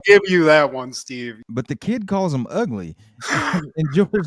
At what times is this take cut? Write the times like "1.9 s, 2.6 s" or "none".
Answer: 1.4 s